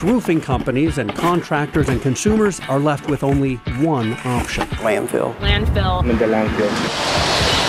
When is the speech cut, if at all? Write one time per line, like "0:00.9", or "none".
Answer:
0:02.5